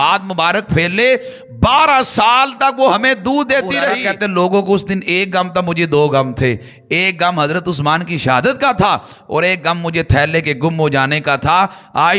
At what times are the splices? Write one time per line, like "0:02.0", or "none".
0:04.0

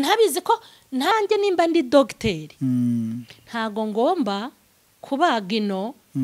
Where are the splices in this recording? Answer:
0:01.1

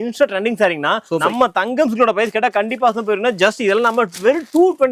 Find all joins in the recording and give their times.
0:01.2

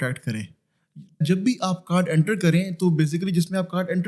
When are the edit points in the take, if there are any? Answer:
0:01.2

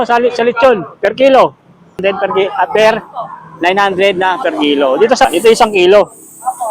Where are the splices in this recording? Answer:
0:02.0
0:05.3

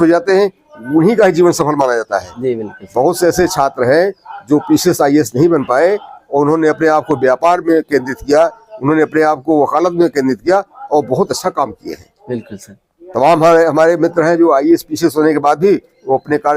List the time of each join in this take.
none

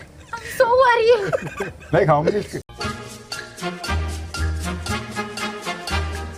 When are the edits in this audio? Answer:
none

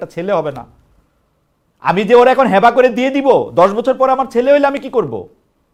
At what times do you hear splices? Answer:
none

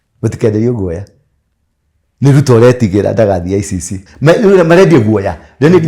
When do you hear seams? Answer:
0:04.0

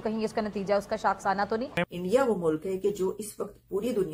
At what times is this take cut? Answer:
0:01.8

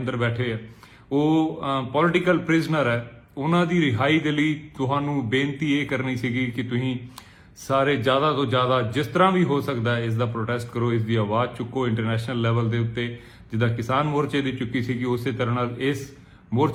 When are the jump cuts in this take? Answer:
none

